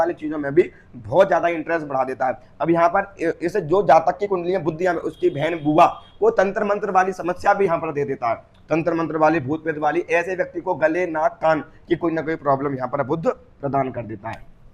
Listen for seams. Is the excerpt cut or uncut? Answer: uncut